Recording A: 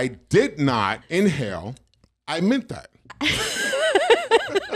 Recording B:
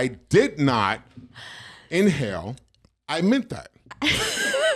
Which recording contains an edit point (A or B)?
A